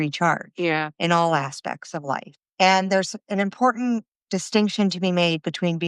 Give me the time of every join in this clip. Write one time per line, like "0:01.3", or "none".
0:02.4

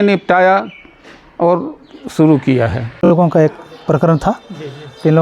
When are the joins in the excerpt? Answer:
0:03.1

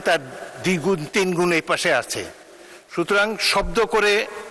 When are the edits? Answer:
none

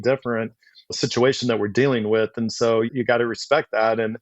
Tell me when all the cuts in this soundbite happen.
0:02.9

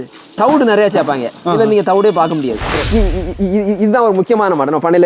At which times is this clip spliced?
0:02.8

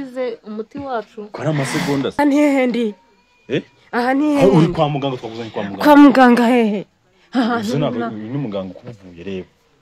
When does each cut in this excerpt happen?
0:02.1

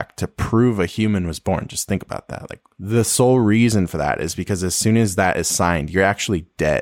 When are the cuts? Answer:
none

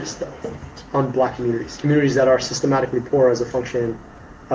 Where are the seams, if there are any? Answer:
0:01.7

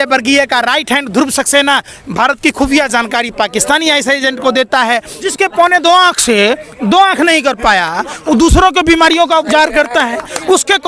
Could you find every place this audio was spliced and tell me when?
0:05.3

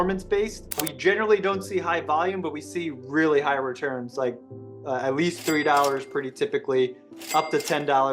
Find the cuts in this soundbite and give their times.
0:00.9

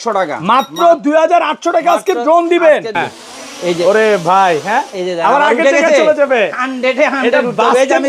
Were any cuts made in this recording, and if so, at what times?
0:02.9

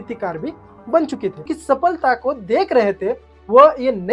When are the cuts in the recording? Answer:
0:01.5

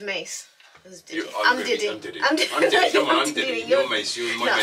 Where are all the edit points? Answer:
none

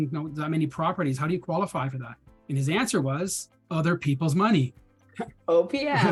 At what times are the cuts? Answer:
none

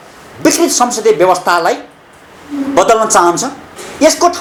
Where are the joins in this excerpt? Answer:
none

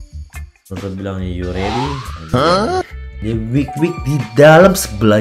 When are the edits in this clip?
0:03.0

